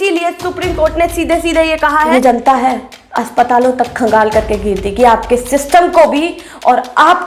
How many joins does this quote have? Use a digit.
1